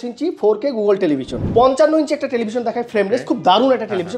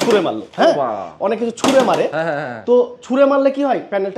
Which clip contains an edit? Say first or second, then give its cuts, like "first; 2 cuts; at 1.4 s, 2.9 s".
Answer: first; 1 cut; at 1.4 s